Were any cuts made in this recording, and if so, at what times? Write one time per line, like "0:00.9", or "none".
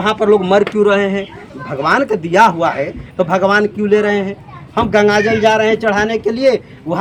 none

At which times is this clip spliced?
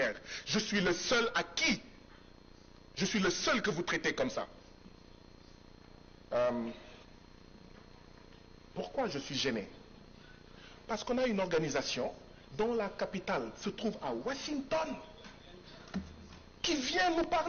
none

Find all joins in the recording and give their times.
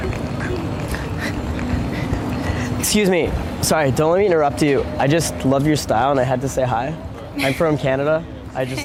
none

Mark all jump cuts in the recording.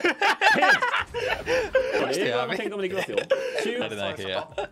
0:02.0
0:03.8

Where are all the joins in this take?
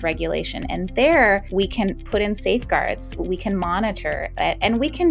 0:01.5
0:03.2

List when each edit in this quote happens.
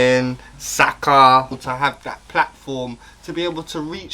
0:01.5

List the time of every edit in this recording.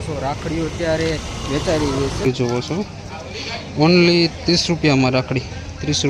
0:02.3

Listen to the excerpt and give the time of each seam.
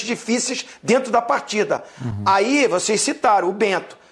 none

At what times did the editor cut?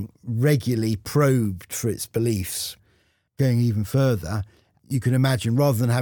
0:01.0
0:03.2

